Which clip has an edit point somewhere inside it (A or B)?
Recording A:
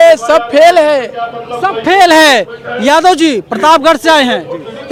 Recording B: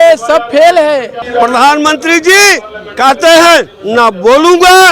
B